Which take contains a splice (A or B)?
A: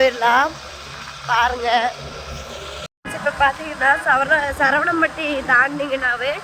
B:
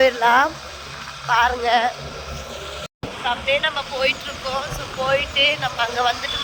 A